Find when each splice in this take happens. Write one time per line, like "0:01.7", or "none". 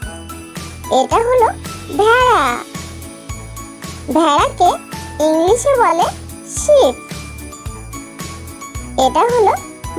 0:00.9